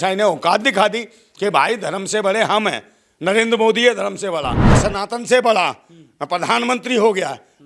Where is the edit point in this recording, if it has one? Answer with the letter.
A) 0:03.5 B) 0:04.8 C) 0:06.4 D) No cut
B